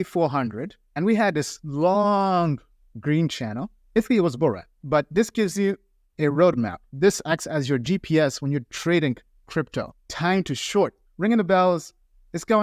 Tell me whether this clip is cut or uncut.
cut